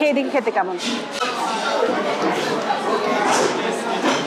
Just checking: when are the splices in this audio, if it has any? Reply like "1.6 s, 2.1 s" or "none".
none

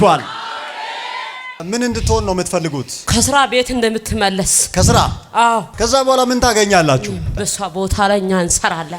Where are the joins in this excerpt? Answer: 1.5 s, 5.7 s, 7.3 s

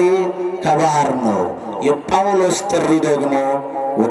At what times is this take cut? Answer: none

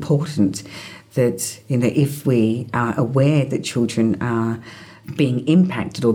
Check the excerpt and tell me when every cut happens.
none

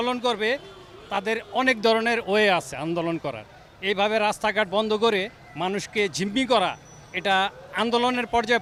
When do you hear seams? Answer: none

